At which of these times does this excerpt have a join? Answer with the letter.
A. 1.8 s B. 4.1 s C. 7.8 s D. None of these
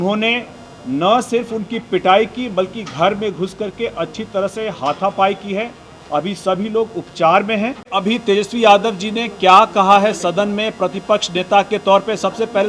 C